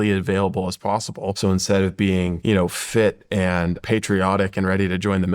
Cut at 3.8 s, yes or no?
yes